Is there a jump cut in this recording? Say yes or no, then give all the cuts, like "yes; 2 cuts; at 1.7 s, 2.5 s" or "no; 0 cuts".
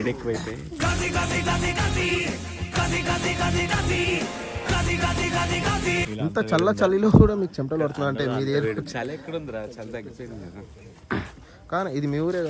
no; 0 cuts